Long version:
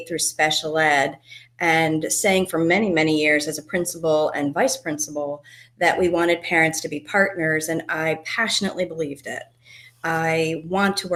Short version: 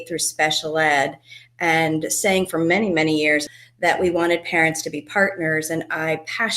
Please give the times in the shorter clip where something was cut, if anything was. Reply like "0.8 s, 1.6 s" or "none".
3.6 s